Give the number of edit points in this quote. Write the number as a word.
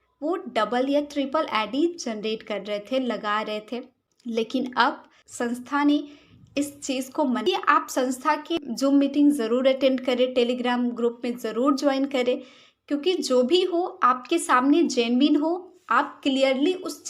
one